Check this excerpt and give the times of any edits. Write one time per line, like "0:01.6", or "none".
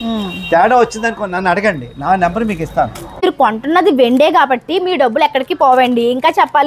0:03.0